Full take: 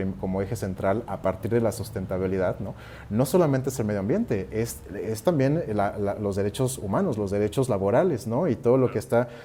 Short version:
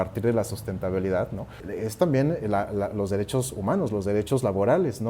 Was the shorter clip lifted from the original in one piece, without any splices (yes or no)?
no